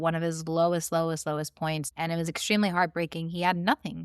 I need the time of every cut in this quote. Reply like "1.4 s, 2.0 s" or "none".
1.9 s